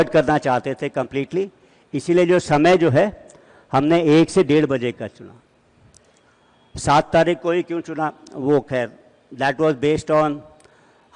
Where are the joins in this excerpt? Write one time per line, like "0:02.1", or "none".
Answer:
none